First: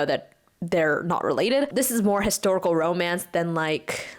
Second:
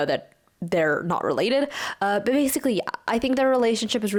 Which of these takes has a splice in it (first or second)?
first